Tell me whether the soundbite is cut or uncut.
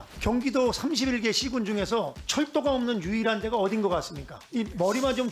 uncut